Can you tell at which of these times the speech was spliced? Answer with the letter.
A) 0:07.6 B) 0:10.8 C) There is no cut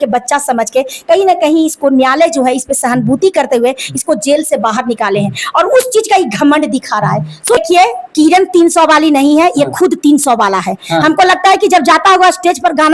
A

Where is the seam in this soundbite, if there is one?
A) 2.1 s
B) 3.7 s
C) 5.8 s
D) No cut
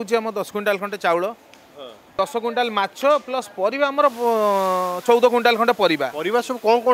A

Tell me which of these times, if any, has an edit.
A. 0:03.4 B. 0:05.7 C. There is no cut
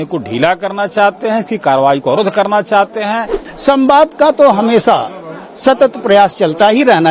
A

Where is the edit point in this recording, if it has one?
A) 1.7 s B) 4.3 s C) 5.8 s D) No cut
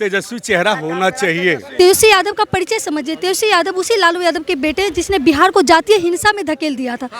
A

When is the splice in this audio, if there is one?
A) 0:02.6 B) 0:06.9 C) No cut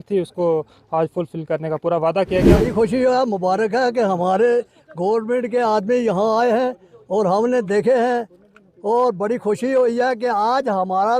A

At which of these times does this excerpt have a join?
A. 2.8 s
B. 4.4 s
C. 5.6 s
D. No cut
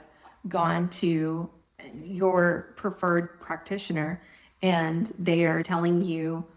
C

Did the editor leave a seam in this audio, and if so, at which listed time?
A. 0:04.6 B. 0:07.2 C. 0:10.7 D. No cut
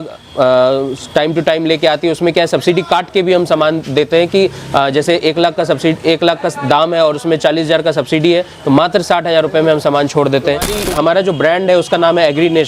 C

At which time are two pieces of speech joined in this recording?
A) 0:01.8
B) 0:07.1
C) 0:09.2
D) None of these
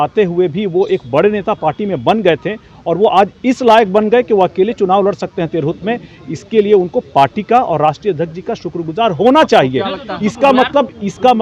D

